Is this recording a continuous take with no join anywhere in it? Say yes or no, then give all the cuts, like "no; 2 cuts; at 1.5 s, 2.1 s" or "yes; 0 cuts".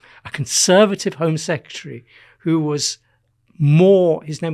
yes; 0 cuts